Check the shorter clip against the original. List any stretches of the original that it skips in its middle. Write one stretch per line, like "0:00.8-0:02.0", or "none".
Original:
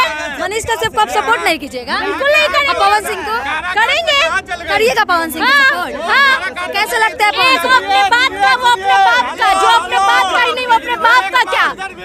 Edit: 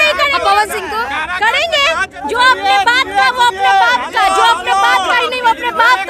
0:04.7-0:07.6

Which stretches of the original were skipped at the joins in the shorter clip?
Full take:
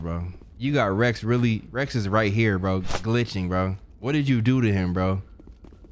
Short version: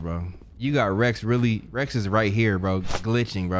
none

